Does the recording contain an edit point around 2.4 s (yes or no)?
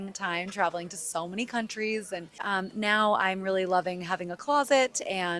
yes